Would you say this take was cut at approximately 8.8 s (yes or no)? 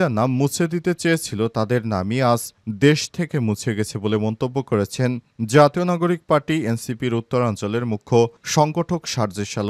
no